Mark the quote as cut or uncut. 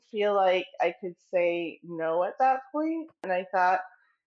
cut